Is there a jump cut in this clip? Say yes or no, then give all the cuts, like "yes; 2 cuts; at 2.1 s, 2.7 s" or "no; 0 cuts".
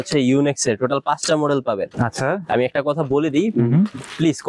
no; 0 cuts